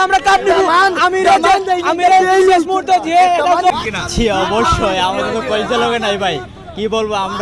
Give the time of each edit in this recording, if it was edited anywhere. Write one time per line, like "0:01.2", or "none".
0:03.7